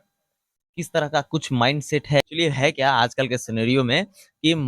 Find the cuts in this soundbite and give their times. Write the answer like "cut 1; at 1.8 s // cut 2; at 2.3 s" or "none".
cut 1; at 2.2 s